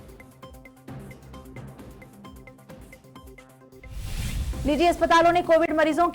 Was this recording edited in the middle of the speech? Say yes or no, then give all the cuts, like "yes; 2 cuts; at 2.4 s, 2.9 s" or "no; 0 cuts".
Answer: no; 0 cuts